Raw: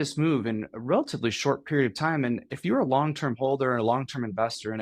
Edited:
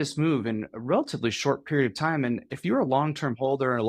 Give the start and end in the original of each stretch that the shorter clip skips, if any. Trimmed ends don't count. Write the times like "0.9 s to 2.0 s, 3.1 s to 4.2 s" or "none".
none